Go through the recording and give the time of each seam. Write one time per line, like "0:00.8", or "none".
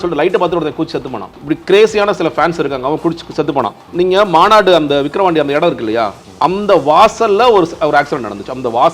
0:01.4
0:03.8